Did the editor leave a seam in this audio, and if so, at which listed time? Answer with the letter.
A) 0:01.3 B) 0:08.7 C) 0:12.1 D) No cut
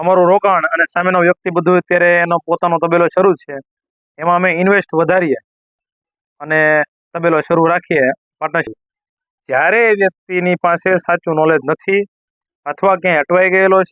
B